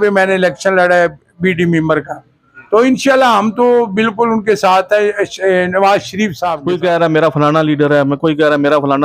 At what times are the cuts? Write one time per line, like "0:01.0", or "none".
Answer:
0:06.5